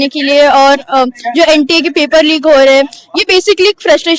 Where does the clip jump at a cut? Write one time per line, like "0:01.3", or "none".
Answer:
none

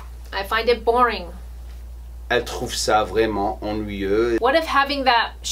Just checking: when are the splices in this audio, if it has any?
0:04.4

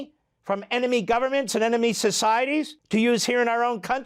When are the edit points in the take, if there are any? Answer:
0:02.8

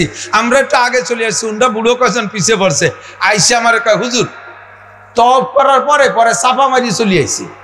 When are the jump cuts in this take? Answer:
none

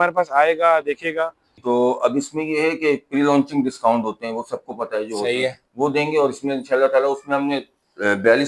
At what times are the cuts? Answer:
0:01.5

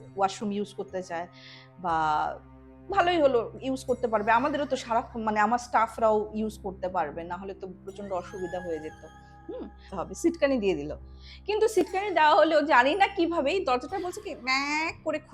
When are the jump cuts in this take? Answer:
0:09.9

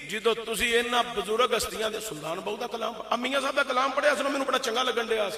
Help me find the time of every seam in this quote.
none

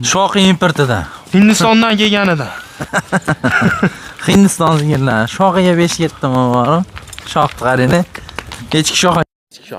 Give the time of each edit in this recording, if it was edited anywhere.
none

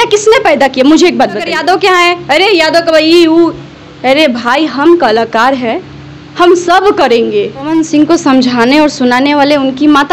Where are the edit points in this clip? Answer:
0:01.5
0:07.7

